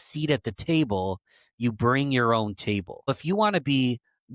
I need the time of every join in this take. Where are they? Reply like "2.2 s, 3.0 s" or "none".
3.1 s